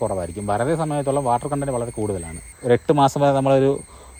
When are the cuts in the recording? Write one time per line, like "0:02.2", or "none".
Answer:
0:02.5